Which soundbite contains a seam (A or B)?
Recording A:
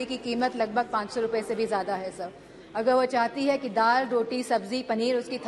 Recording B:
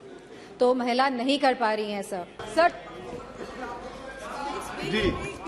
B